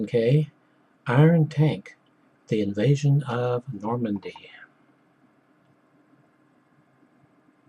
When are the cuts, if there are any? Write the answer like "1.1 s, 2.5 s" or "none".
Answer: 4.3 s